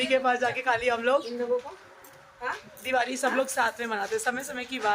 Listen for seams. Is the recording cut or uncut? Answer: uncut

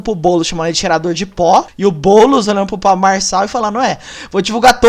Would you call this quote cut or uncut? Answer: cut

